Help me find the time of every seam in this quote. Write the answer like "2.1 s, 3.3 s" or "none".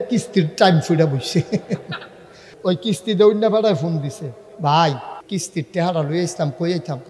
2.5 s, 5.2 s